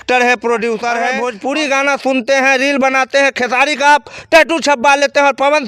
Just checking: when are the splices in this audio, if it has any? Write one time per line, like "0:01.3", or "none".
0:01.1